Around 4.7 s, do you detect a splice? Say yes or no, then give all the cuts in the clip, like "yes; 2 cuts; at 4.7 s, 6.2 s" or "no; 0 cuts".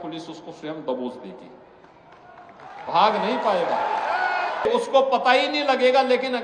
yes; 1 cut; at 4.7 s